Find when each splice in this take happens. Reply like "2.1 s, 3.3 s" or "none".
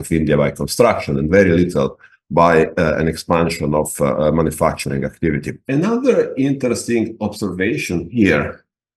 5.6 s